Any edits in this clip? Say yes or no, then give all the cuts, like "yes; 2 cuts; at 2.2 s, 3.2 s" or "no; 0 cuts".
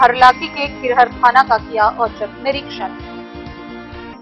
no; 0 cuts